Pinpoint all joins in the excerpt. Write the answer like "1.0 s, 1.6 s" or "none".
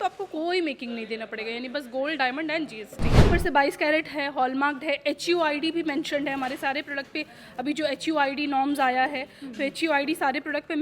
3.3 s